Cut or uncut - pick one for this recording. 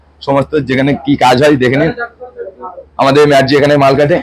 uncut